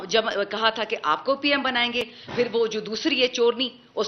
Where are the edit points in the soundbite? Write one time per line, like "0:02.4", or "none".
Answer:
none